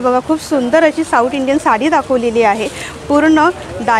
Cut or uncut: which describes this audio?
uncut